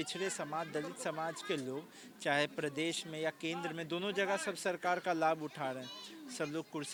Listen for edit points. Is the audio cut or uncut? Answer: uncut